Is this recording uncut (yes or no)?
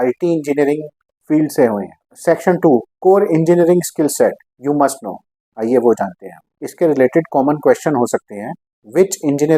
yes